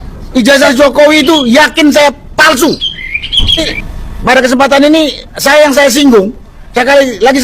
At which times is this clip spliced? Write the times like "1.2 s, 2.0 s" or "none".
3.6 s